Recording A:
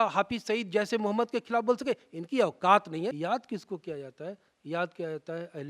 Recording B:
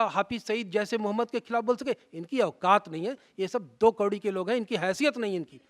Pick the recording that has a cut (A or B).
A